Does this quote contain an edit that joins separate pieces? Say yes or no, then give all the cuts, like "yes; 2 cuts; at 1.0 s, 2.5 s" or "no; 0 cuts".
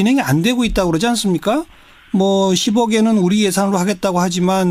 no; 0 cuts